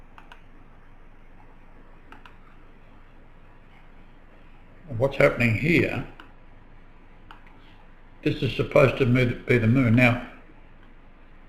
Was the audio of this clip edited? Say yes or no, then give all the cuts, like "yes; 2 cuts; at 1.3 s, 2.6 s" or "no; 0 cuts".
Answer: yes; 1 cut; at 10.1 s